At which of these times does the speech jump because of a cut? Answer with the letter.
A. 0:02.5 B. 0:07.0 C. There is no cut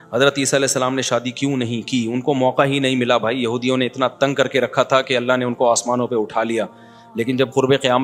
C